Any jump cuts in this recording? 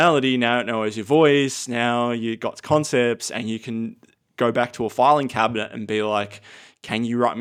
no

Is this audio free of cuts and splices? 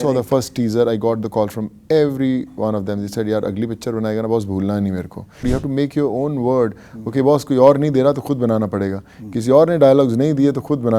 no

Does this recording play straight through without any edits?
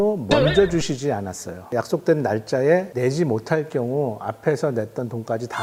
yes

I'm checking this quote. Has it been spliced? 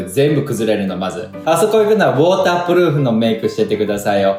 no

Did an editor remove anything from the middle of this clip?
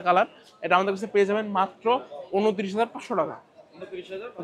no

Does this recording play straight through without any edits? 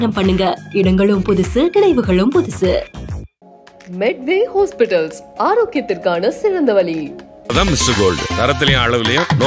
yes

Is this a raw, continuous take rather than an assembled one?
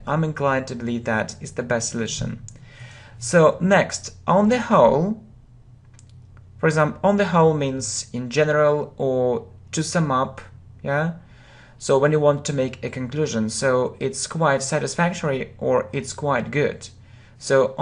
no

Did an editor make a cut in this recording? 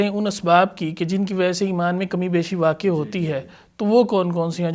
no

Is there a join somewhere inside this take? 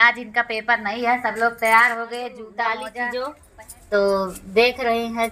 yes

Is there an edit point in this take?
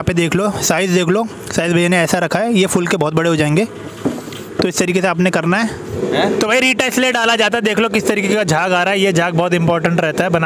yes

